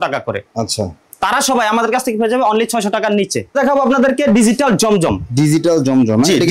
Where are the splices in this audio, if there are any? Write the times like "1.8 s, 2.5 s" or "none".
3.5 s